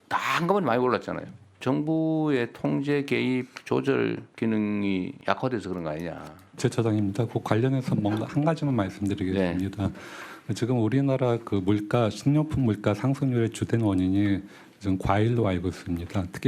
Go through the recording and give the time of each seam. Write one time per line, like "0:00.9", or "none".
0:01.6
0:04.3
0:05.1
0:06.6